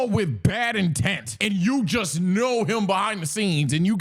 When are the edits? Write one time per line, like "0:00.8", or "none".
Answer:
0:01.3